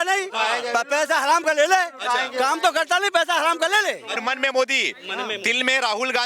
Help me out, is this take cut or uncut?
cut